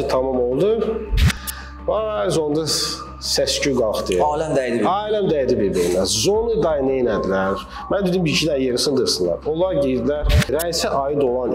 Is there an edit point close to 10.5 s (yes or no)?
yes